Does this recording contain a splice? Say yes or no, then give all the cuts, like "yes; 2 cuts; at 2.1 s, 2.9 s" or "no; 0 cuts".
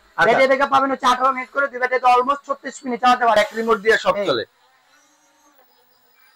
yes; 1 cut; at 3.4 s